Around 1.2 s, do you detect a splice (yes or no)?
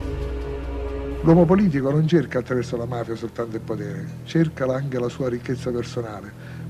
yes